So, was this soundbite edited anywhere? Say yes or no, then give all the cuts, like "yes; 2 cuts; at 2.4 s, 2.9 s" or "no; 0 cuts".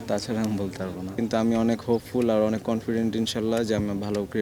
yes; 1 cut; at 1.1 s